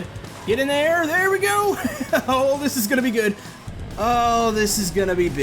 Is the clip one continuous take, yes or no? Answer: no